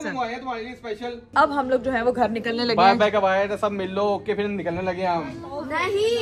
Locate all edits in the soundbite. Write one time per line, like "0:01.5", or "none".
0:01.3